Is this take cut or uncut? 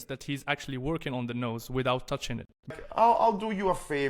cut